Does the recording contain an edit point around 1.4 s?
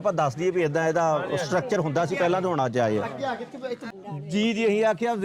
no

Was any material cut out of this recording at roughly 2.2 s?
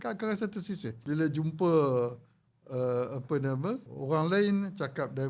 no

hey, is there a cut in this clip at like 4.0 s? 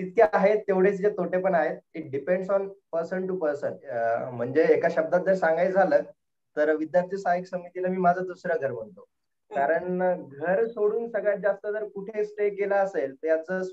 yes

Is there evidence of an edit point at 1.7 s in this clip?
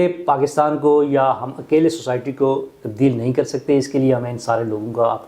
no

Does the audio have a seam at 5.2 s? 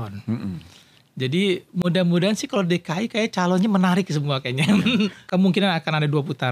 yes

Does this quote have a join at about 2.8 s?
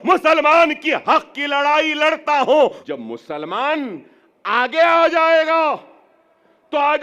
yes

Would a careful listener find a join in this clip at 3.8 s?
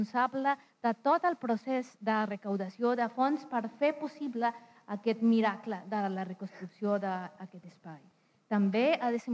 no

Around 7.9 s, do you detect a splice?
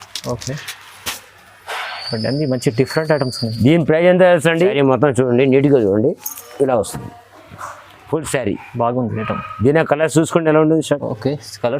no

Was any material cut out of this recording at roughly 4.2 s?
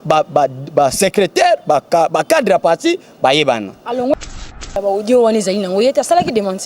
yes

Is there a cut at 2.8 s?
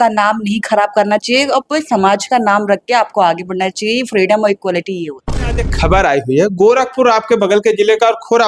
no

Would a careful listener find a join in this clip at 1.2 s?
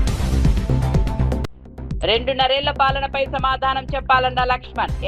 yes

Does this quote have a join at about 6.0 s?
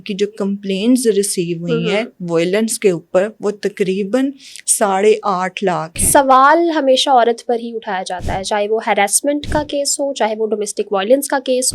yes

